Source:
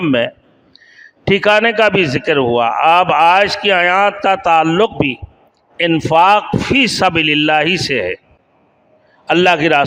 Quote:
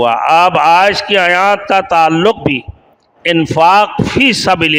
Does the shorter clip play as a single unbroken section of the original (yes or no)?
yes